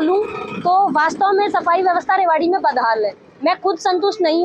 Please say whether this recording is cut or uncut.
uncut